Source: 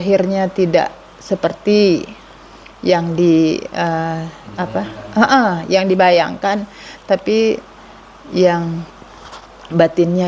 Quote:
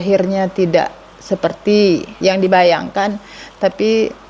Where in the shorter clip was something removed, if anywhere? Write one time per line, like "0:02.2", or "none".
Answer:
0:02.1